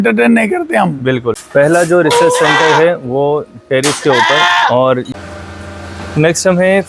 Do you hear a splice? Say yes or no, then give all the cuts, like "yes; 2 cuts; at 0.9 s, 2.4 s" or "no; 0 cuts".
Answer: yes; 2 cuts; at 1.4 s, 5.1 s